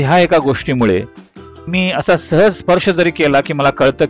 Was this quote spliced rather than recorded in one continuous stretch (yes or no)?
yes